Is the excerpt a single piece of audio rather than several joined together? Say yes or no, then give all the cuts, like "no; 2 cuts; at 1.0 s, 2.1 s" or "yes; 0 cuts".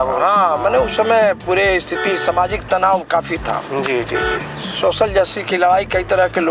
yes; 0 cuts